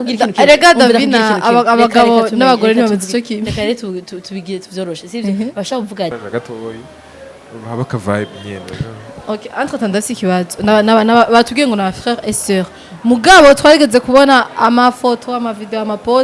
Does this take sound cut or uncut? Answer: cut